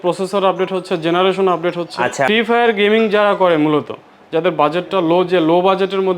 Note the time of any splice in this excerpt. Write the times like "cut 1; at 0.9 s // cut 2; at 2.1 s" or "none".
cut 1; at 2.3 s